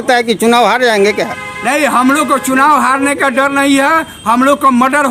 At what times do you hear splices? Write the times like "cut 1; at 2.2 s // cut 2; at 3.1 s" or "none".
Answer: none